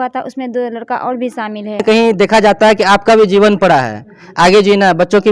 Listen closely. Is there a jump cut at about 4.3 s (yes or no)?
no